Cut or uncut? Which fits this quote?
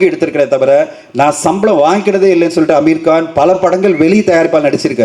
uncut